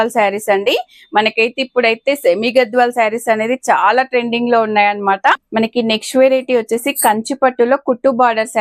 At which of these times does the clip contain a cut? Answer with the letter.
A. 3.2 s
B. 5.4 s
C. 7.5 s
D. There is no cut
B